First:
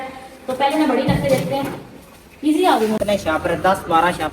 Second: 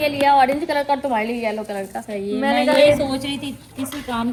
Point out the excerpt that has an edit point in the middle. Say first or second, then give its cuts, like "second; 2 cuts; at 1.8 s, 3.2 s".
first; 1 cut; at 3.0 s